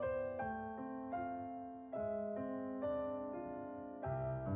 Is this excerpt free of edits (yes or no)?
yes